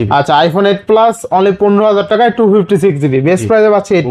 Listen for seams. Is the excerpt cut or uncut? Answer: uncut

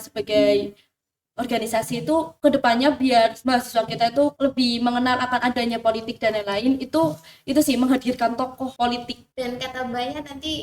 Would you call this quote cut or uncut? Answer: cut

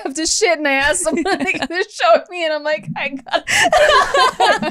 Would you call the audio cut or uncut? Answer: uncut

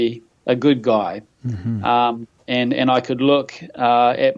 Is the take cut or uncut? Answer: uncut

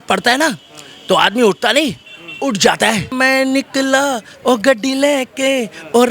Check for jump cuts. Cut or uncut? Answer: cut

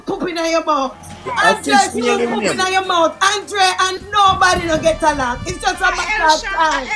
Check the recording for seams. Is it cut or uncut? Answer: cut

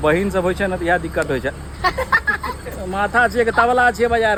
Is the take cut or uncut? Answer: uncut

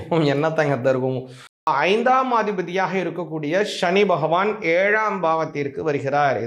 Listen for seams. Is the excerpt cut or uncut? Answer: cut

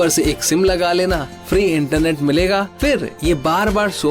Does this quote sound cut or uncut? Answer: cut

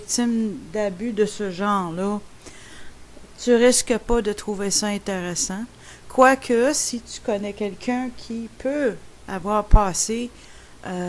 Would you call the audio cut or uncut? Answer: cut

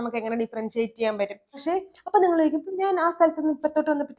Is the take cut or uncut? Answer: cut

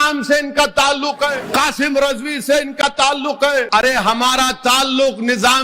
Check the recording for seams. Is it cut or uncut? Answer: cut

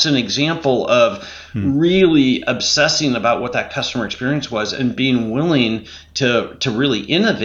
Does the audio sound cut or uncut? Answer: uncut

